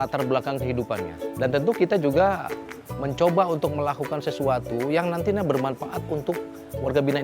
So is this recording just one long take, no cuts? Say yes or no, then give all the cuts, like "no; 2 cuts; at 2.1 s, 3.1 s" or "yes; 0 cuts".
no; 1 cut; at 1.2 s